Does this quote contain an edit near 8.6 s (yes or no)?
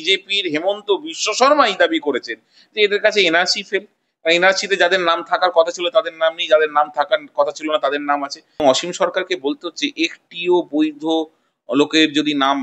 yes